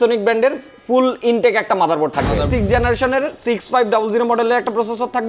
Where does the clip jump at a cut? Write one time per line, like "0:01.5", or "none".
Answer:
0:02.5